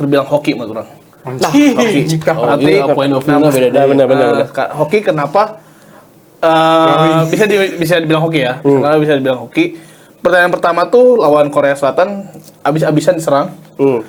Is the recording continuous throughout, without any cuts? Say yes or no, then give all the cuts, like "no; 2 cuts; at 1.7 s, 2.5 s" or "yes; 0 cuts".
yes; 0 cuts